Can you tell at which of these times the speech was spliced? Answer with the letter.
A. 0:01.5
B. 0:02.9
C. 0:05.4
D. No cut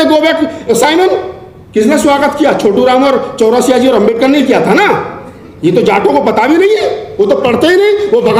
D